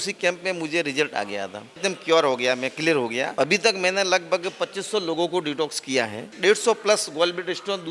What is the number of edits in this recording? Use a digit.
3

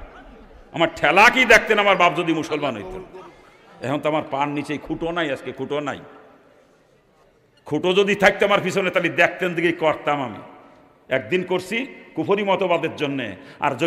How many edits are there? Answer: 1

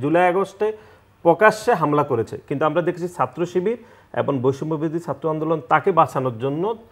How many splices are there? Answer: 0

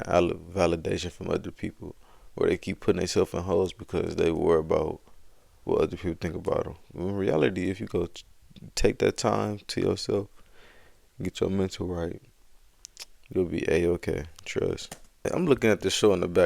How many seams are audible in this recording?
1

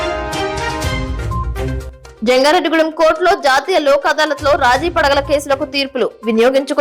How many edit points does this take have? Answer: 1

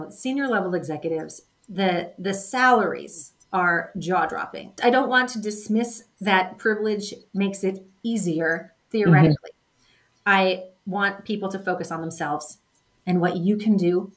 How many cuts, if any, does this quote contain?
1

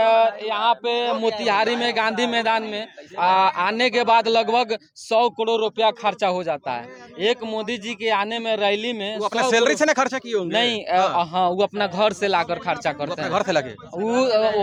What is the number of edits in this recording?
0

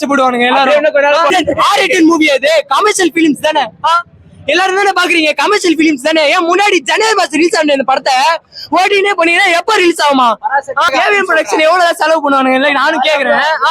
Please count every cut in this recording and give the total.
2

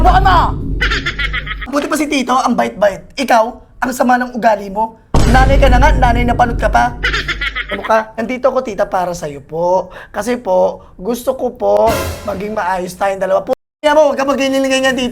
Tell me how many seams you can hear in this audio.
2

